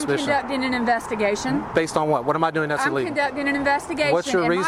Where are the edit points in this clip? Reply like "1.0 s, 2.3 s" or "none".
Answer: none